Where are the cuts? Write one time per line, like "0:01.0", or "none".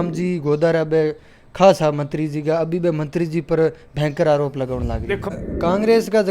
0:05.2

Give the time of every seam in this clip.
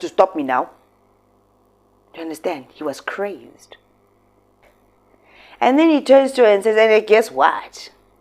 0:04.6

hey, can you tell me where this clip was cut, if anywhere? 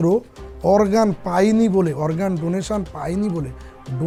none

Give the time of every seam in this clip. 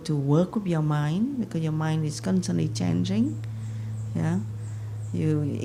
none

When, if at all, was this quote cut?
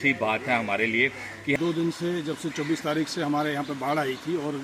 0:01.5

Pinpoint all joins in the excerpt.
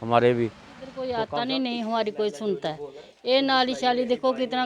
0:01.3

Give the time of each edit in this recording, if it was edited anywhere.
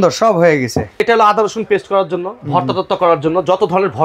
0:01.0

